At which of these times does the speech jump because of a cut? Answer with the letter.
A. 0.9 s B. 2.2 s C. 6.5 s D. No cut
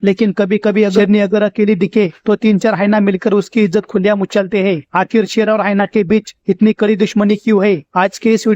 A